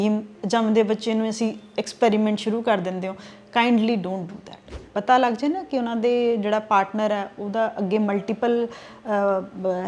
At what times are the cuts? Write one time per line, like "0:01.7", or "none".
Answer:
0:04.8